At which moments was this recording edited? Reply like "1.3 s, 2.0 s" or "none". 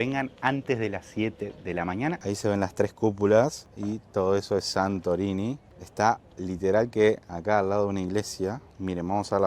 2.2 s